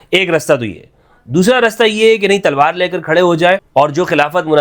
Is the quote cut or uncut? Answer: cut